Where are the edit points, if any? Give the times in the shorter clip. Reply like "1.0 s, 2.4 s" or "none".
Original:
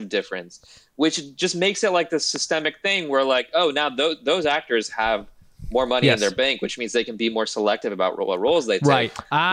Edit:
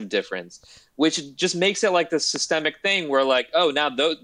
none